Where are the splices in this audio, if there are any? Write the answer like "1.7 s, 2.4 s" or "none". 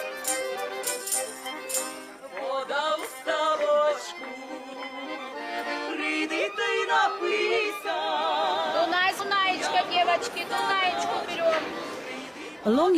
10.8 s